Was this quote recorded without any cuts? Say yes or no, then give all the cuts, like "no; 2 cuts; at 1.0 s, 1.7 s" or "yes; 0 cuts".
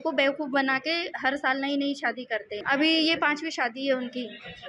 no; 1 cut; at 2.6 s